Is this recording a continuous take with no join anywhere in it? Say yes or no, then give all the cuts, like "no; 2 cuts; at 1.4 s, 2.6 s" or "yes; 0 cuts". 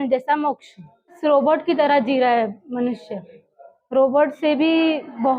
no; 1 cut; at 1.2 s